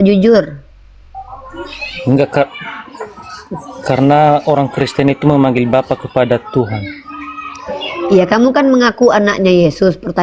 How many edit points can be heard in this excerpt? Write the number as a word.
zero